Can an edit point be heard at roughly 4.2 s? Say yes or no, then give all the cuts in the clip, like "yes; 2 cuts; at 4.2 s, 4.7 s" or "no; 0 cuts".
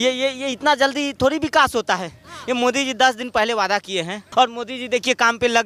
yes; 1 cut; at 4.2 s